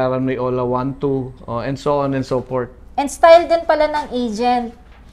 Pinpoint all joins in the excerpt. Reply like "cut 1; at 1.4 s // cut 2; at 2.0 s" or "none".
none